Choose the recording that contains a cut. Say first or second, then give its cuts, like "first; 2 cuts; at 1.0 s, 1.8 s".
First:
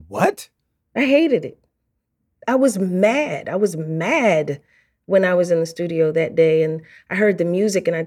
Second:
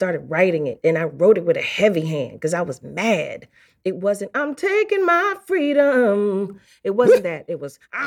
first; 1 cut; at 2.4 s